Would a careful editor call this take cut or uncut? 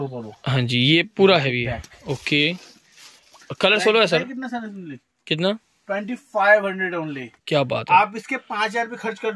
uncut